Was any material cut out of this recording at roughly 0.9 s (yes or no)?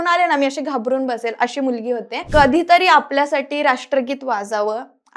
no